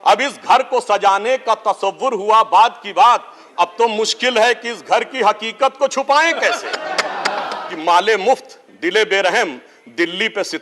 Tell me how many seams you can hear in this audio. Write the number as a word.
one